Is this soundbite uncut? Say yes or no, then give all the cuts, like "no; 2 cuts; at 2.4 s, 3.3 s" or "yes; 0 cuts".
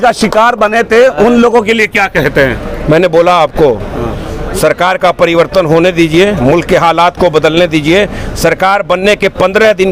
yes; 0 cuts